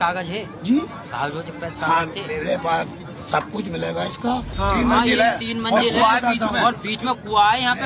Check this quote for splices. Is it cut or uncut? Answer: cut